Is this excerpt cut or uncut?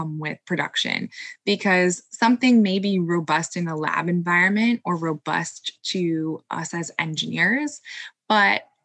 cut